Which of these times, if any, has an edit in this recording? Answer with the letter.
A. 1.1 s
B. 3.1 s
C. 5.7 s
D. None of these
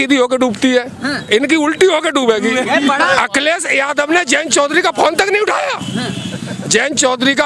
B